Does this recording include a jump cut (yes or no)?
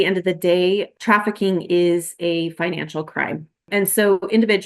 yes